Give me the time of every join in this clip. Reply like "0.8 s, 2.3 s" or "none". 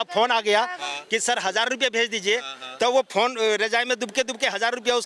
none